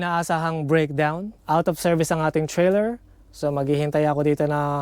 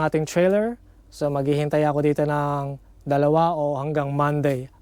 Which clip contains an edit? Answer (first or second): first